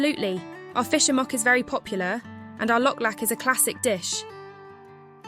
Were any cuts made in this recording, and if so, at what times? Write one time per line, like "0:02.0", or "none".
0:04.0